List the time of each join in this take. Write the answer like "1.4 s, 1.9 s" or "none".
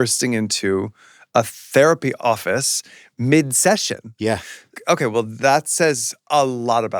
2.2 s, 4.8 s

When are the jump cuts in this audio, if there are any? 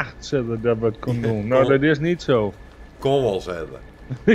none

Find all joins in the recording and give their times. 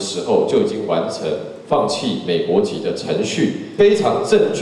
3.6 s

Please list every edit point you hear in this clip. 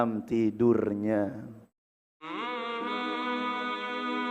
2.3 s

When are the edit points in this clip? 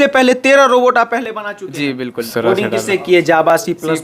2.2 s

